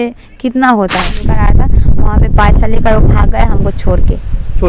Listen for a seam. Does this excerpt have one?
yes; 1 cut; at 1.2 s

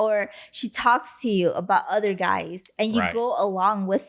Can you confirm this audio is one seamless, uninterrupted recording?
yes; 0 cuts

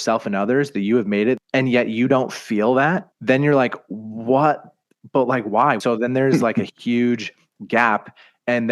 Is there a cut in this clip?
yes; 3 cuts; at 1.4 s, 3.1 s, 5.8 s

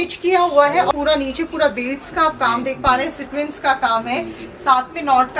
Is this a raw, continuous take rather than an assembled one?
no; 1 cut; at 0.9 s

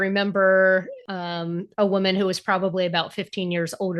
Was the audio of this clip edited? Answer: yes; 1 cut; at 1.0 s

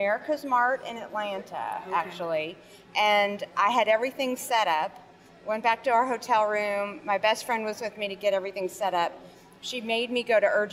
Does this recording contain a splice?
no; 0 cuts

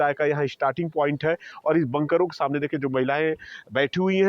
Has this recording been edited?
yes; 1 cut; at 1.5 s

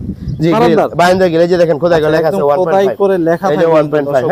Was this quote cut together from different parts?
no; 0 cuts

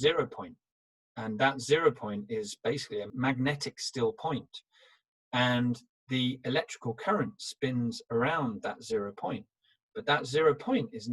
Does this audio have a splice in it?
yes; 1 cut; at 3.1 s

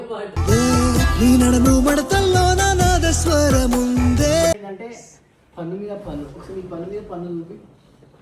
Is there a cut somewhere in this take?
yes; 1 cut; at 4.5 s

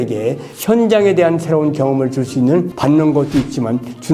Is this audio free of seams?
no; 1 cut; at 2.7 s

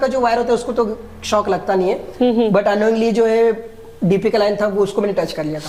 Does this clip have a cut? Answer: no; 0 cuts

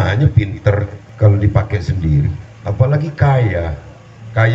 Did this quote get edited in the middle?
yes; 2 cuts; at 1.0 s, 2.5 s

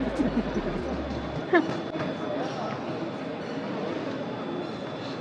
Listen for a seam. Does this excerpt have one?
no; 0 cuts

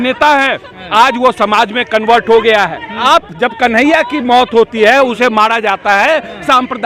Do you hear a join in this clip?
yes; 1 cut; at 3.0 s

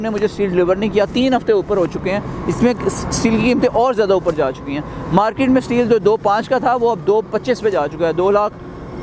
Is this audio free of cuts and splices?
yes; 0 cuts

